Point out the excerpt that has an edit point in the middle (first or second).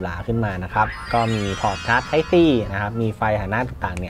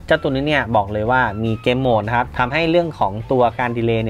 first